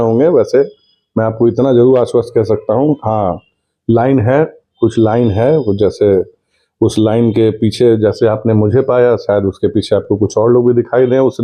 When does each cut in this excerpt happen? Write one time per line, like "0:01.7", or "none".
none